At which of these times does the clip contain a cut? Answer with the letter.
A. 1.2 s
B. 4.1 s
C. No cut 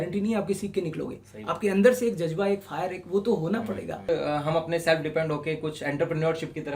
B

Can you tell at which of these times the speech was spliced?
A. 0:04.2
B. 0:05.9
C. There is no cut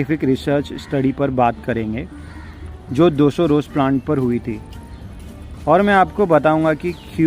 C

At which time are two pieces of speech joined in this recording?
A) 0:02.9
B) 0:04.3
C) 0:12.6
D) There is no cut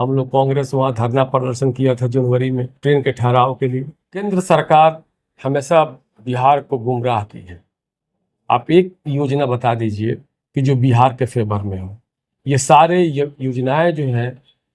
B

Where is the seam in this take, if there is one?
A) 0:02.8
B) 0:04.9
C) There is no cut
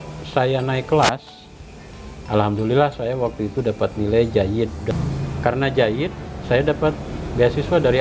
B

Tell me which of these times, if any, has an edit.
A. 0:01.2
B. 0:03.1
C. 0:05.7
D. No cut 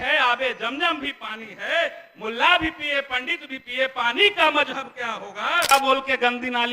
C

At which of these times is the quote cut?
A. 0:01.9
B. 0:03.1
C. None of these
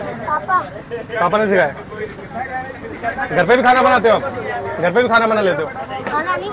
C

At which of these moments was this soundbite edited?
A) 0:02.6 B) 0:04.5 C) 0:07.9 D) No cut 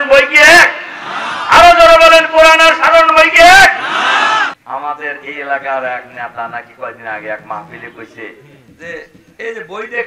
B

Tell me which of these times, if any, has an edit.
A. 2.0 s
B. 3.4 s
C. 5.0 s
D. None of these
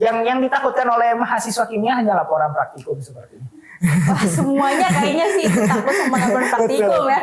D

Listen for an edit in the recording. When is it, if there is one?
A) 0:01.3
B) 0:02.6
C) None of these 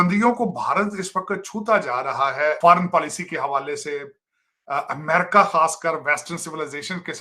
B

